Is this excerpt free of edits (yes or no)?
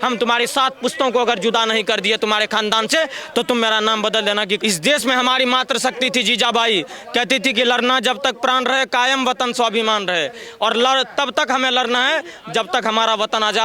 no